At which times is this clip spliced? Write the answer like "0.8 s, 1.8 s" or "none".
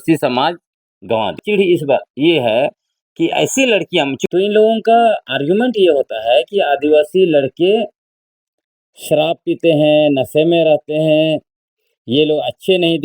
1.4 s, 4.2 s